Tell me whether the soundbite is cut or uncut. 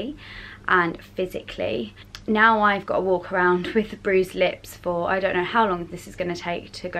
cut